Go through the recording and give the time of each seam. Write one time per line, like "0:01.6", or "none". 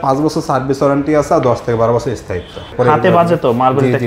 0:02.7